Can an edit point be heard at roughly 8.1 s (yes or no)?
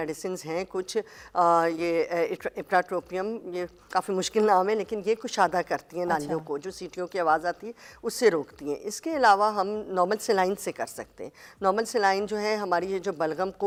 no